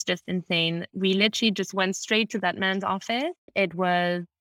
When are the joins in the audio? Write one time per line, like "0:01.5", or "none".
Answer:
0:03.5